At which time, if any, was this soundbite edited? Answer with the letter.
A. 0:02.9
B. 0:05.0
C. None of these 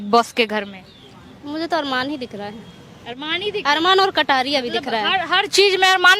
C